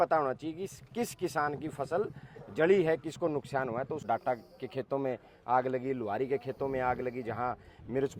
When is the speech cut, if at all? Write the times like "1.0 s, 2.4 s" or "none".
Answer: 4.0 s